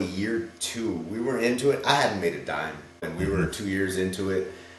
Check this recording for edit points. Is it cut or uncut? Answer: uncut